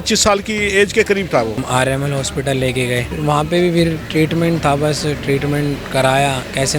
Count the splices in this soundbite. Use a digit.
2